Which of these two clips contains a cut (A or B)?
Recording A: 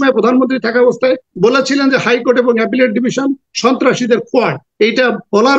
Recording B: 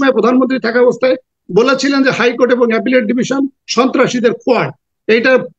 A